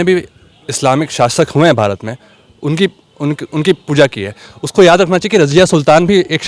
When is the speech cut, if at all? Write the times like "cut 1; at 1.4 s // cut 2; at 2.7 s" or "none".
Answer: none